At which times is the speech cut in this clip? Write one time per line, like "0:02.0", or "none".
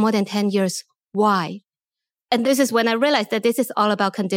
none